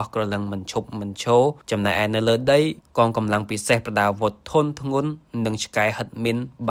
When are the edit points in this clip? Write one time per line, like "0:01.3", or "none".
none